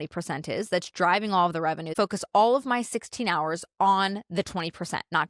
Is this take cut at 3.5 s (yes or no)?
no